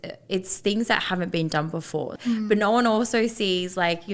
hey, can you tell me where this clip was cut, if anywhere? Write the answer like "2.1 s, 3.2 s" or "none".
2.1 s